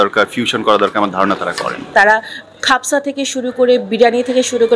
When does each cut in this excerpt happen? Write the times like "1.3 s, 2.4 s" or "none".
1.9 s